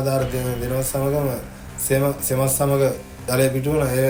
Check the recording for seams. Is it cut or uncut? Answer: uncut